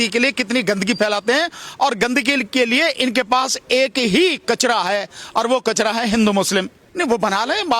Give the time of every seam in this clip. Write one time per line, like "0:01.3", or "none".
0:06.8